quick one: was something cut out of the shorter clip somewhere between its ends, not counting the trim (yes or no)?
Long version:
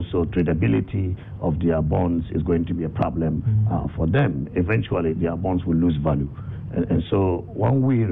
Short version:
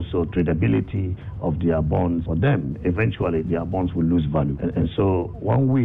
yes